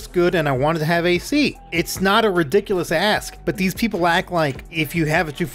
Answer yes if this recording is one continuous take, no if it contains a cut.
no